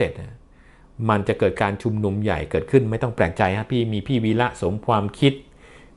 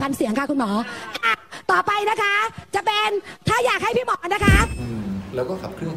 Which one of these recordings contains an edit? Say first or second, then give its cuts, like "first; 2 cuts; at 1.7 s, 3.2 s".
second; 1 cut; at 4.8 s